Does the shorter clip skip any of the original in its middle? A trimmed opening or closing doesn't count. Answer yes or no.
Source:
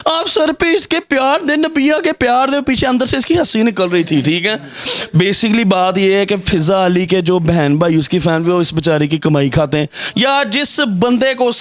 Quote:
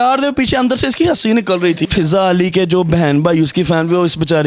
yes